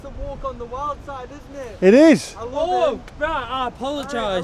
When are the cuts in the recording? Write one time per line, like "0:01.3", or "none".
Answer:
none

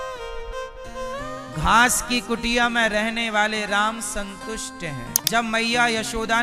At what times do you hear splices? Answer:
0:05.1

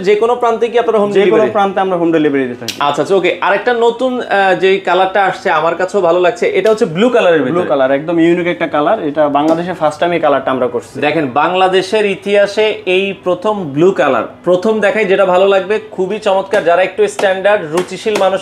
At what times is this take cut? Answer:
none

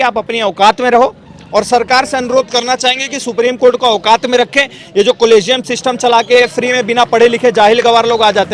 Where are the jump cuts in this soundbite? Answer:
none

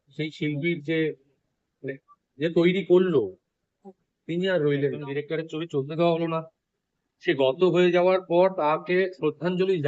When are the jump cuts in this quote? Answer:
0:05.1

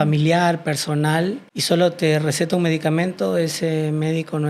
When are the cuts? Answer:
0:01.5

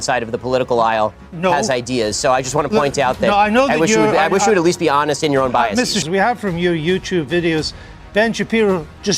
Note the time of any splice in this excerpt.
0:06.0

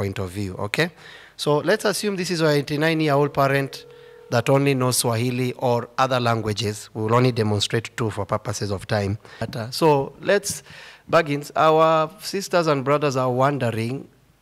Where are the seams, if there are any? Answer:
0:09.4

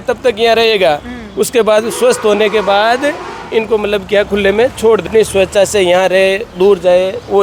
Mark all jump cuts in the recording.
none

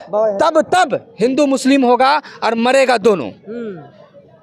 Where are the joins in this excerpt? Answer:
none

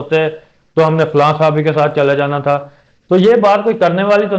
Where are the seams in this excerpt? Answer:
none

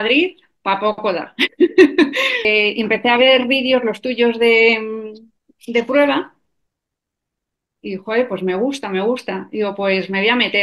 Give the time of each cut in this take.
0:02.4

